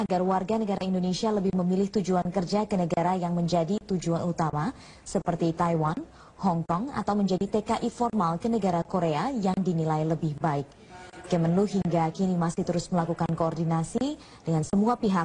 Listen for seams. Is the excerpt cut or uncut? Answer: cut